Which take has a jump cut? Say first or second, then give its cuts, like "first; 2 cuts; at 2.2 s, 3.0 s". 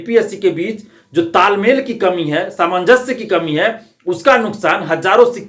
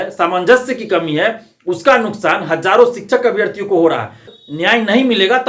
second; 1 cut; at 4.4 s